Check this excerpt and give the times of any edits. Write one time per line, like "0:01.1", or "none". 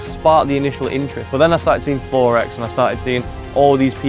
0:01.2

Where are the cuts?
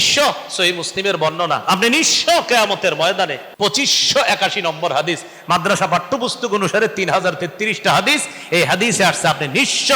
0:03.5

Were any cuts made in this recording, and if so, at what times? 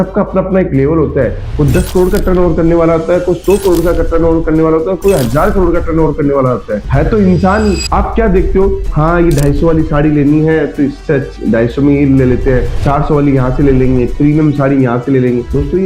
0:07.8

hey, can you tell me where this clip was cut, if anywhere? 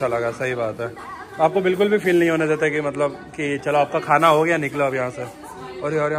none

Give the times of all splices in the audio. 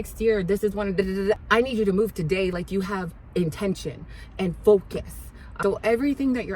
0:02.5
0:05.4

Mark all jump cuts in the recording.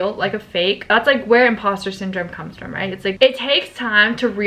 0:00.8
0:03.1

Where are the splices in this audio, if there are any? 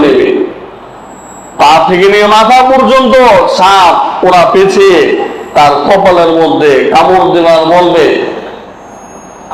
none

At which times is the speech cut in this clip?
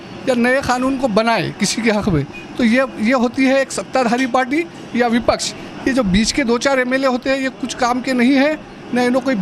none

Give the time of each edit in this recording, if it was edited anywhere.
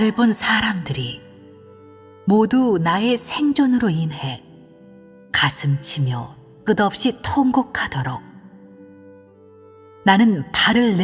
0:02.3

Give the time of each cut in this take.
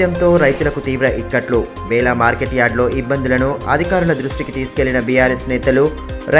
none

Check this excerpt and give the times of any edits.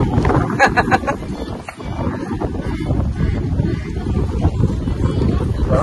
none

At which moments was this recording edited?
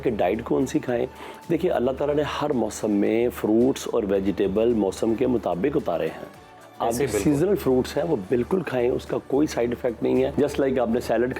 0:10.3

